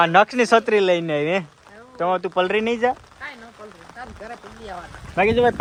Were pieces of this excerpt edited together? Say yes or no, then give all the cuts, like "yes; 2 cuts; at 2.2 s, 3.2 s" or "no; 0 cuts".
no; 0 cuts